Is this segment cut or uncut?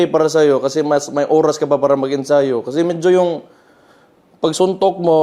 uncut